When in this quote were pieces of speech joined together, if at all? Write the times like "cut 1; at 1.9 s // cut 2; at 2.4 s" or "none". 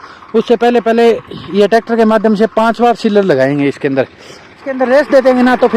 cut 1; at 4.7 s